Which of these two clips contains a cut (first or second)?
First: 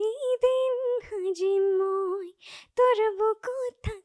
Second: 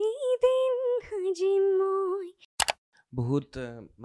second